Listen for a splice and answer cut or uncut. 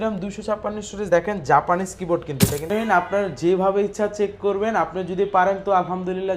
cut